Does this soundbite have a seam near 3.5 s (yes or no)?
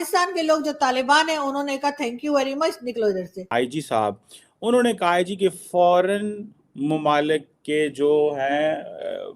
yes